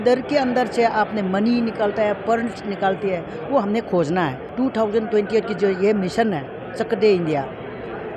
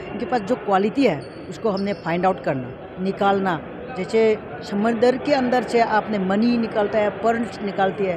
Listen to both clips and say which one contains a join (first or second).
first